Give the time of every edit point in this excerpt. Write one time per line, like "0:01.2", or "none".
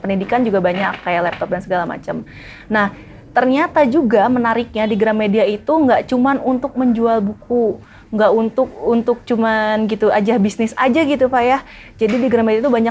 none